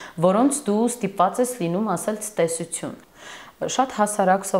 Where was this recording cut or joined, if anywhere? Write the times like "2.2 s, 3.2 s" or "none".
3.1 s